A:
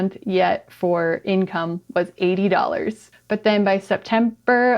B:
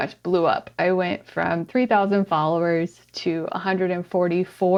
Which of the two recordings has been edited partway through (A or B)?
A